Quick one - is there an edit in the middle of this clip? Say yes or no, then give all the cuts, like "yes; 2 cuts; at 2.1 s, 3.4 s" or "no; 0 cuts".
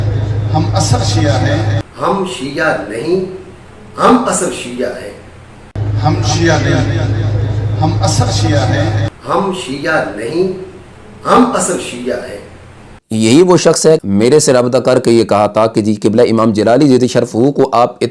yes; 5 cuts; at 1.9 s, 5.7 s, 9.2 s, 13.0 s, 14.0 s